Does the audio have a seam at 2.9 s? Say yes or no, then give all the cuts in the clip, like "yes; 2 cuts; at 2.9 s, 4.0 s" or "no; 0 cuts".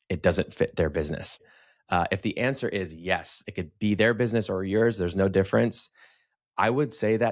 no; 1 cut; at 1.4 s